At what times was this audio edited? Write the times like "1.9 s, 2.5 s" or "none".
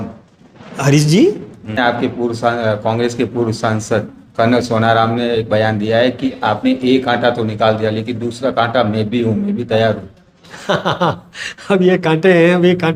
1.8 s

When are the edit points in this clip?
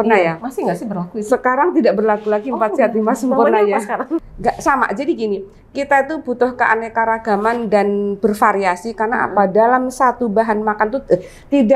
4.2 s

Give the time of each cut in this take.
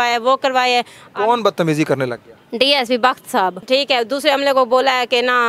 3.6 s

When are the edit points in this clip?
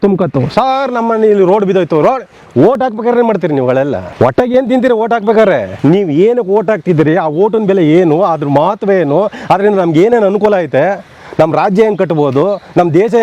4.0 s, 5.7 s

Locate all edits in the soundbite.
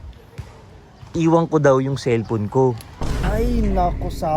3.3 s

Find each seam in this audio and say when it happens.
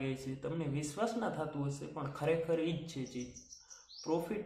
none

